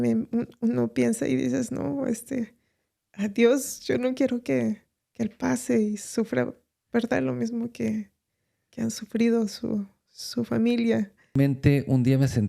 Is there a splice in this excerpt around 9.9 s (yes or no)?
no